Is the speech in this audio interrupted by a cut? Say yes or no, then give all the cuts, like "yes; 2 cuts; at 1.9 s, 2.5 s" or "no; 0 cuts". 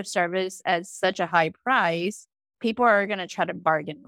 no; 0 cuts